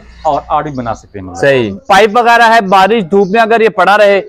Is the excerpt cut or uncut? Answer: cut